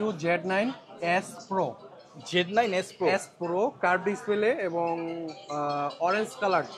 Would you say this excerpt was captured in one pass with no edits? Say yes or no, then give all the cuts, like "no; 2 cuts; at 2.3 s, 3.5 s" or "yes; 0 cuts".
yes; 0 cuts